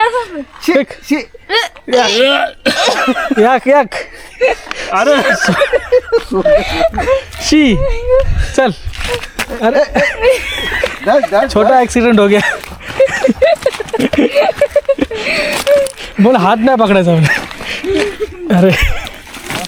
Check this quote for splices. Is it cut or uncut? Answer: uncut